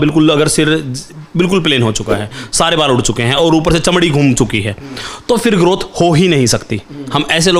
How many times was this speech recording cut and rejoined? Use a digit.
0